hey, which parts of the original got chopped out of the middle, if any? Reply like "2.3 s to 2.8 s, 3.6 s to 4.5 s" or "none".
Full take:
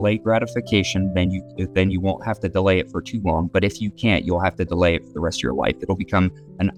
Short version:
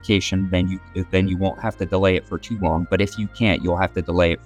none